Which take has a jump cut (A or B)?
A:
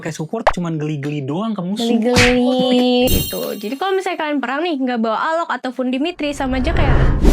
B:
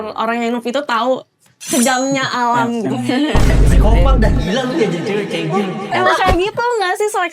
A